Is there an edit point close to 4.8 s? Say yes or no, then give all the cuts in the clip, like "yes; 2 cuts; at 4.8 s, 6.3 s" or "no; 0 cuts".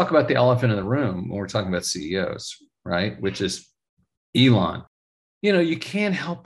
yes; 1 cut; at 4.8 s